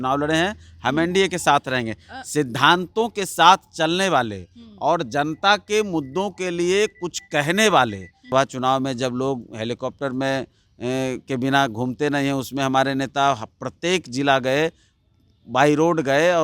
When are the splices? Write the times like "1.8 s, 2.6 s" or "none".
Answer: 8.2 s